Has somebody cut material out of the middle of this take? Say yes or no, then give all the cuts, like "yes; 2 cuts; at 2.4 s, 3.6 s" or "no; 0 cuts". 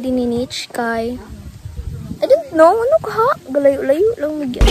no; 0 cuts